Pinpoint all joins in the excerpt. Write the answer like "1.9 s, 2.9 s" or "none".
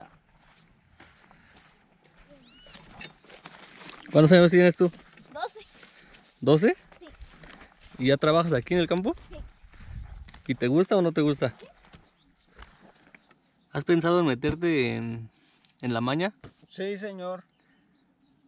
2.3 s, 13.2 s